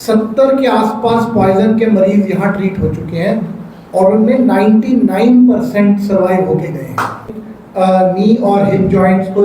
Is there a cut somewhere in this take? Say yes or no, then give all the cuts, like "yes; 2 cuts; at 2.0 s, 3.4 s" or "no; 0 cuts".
yes; 1 cut; at 7.4 s